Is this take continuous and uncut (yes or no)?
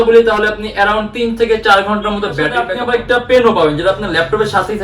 no